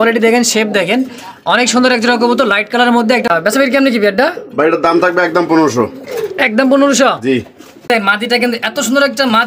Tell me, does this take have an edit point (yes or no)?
yes